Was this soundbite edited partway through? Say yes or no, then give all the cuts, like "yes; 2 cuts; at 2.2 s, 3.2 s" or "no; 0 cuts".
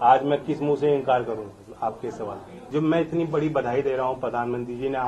yes; 1 cut; at 2.6 s